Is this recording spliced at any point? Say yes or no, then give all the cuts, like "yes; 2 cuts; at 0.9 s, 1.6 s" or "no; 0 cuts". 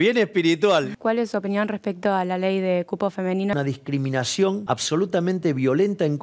yes; 3 cuts; at 0.9 s, 3.5 s, 4.6 s